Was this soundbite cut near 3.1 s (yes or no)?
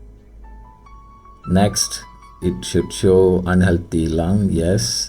no